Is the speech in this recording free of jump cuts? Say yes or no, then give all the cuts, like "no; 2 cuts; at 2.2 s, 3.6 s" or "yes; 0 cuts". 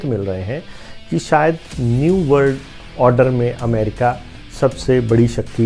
yes; 0 cuts